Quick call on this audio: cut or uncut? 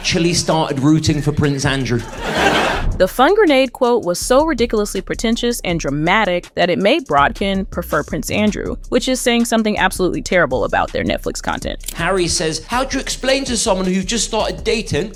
uncut